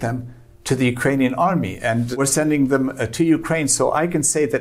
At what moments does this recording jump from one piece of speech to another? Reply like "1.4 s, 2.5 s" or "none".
2.2 s